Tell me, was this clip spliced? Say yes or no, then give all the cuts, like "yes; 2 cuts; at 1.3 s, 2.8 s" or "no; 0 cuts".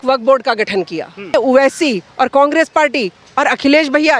yes; 1 cut; at 1.3 s